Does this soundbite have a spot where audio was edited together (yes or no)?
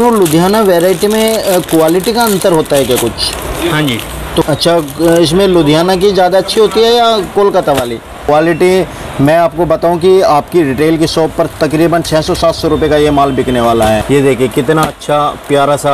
yes